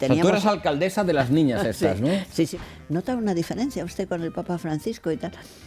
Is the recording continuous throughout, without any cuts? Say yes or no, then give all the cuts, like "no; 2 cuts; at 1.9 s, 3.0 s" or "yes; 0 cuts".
no; 1 cut; at 2.5 s